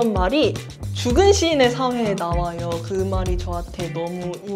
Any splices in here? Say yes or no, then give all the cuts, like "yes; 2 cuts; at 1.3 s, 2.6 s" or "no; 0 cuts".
no; 0 cuts